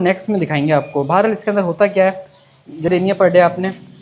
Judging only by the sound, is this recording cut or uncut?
cut